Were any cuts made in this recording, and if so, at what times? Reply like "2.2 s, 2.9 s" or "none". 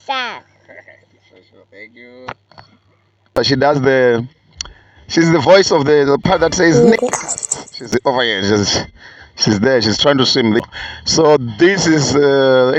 3.3 s, 10.7 s